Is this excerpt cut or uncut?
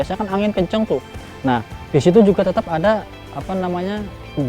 uncut